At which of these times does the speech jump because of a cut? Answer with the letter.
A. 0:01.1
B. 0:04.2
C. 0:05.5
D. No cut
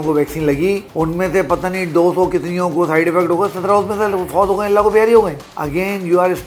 D